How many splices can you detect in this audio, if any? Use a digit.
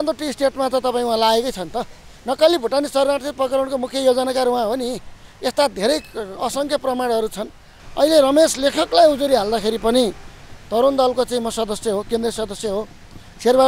1